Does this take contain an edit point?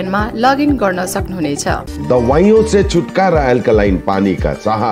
yes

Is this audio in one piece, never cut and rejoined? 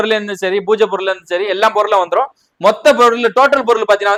yes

